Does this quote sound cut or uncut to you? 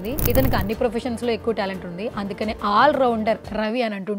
uncut